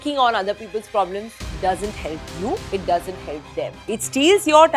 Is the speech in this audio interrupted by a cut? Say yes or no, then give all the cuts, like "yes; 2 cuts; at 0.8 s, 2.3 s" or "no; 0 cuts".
no; 0 cuts